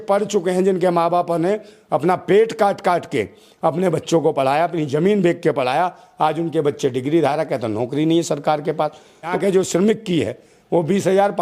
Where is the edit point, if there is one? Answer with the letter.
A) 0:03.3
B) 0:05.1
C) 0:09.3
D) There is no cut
C